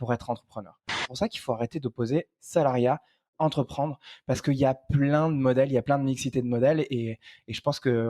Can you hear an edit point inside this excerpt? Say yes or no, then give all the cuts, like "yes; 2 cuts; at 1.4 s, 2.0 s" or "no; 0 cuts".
yes; 1 cut; at 1.1 s